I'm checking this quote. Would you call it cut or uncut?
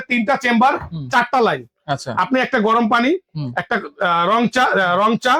uncut